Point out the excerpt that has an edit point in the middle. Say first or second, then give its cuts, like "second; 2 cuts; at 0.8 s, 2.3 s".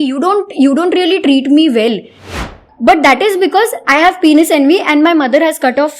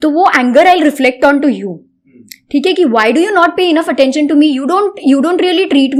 first; 1 cut; at 2.5 s